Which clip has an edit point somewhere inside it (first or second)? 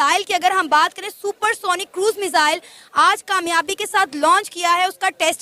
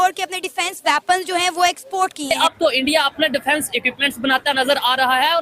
second